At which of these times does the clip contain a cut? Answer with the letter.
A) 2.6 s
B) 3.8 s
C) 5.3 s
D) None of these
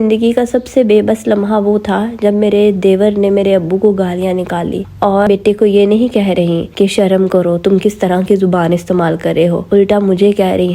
C